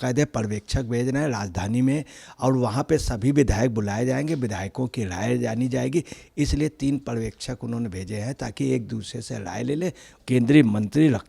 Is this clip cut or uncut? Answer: cut